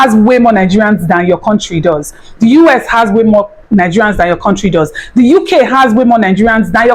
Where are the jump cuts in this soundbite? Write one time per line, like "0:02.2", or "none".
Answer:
none

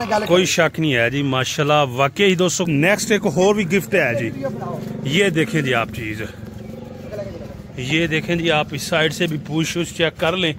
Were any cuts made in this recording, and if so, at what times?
0:02.7

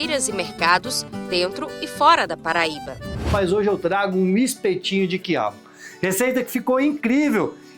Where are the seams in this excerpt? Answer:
0:03.3

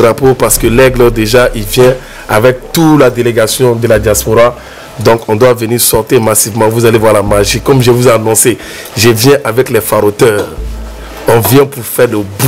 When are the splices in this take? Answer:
none

